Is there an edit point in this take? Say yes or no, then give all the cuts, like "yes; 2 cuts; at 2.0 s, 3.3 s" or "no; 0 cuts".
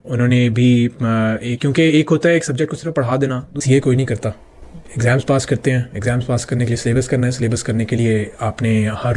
yes; 1 cut; at 3.6 s